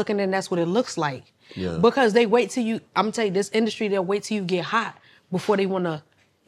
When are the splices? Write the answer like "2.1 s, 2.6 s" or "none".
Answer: none